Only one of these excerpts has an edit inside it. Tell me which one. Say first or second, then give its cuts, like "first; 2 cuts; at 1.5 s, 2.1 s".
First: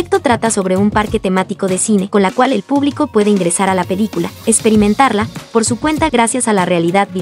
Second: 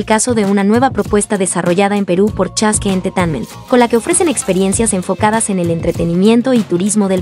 first; 1 cut; at 2.1 s